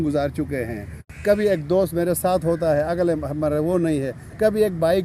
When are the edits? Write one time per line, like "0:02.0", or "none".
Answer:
0:01.0